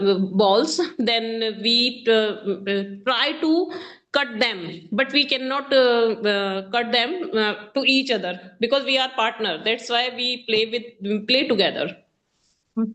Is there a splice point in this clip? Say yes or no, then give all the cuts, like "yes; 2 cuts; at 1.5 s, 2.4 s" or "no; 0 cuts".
no; 0 cuts